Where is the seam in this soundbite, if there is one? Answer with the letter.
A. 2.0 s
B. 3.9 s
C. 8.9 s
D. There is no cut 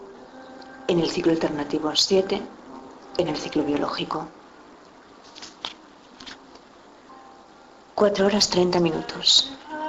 A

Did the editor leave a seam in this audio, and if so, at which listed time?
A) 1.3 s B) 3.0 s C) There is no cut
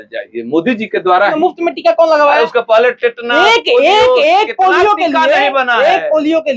A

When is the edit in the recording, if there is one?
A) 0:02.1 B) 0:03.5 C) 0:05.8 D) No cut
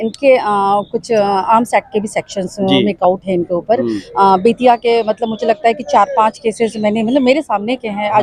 D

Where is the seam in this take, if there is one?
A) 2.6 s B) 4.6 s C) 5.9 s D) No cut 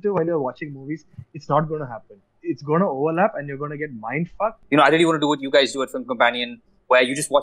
B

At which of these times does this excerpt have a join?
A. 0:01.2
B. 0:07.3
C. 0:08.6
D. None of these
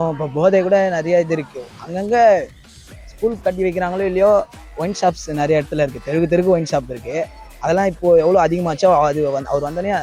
D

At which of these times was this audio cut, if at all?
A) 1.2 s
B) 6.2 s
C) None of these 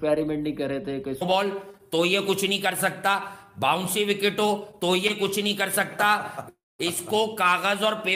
A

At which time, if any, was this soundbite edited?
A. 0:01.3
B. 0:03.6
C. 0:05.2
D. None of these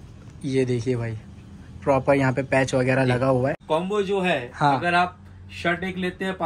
B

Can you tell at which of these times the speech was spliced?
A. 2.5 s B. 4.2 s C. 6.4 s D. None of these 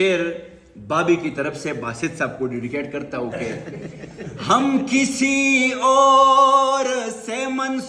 D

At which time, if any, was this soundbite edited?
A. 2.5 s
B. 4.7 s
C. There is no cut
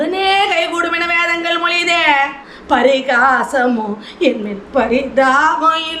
A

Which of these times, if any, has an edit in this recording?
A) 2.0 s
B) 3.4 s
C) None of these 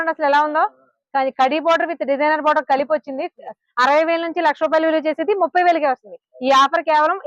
B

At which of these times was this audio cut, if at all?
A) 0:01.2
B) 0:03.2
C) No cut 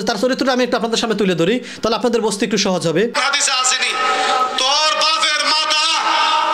B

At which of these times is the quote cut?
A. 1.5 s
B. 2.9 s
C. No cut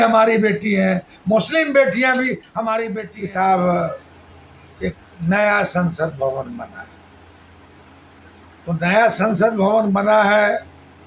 B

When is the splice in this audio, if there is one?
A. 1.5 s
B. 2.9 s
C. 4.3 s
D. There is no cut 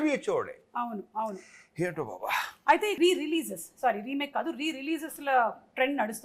B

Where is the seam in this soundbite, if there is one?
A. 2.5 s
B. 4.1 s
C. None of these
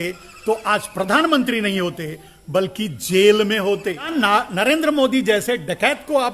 B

